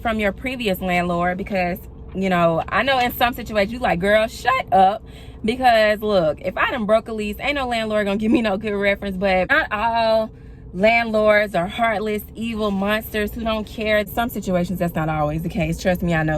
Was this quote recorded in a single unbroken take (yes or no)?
no